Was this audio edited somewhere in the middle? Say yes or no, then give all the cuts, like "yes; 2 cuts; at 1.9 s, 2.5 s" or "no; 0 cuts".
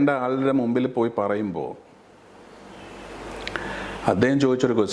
no; 0 cuts